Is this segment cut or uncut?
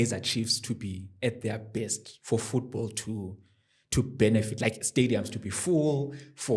uncut